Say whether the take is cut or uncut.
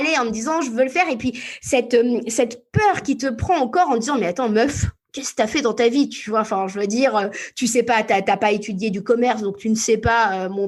uncut